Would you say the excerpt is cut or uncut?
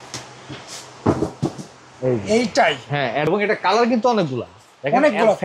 cut